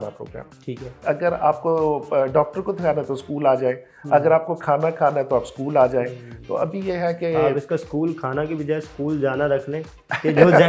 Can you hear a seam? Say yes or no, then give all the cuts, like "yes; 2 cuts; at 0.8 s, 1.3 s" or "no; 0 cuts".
yes; 1 cut; at 1.0 s